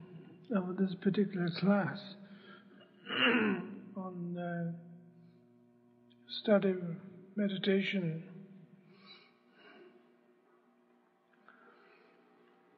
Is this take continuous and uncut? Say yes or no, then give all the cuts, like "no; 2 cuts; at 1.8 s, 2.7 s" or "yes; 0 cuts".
no; 1 cut; at 8.3 s